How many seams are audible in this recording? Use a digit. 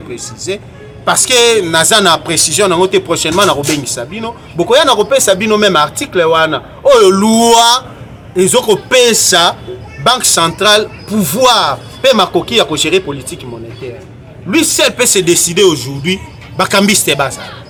0